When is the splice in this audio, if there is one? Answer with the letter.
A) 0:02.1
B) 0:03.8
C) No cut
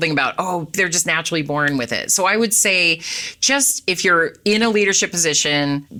C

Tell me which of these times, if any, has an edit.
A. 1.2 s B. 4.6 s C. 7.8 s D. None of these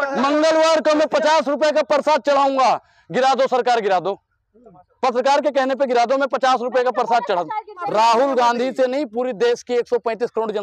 C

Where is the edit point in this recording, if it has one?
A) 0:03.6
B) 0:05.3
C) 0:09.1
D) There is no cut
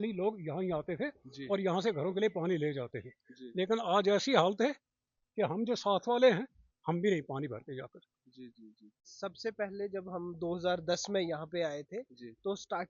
C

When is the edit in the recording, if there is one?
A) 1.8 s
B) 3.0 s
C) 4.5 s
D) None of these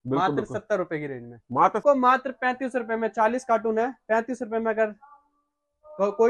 A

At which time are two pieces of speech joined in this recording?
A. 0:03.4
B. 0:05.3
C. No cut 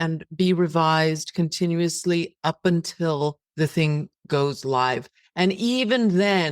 A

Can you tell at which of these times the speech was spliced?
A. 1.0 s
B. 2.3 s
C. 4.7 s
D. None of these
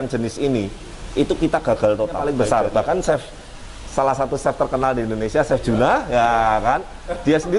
B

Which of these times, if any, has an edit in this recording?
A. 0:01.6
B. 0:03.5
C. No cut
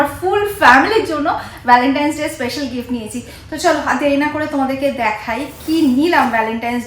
C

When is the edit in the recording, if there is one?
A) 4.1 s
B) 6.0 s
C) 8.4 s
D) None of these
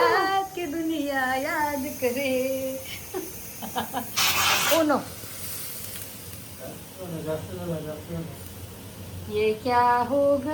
A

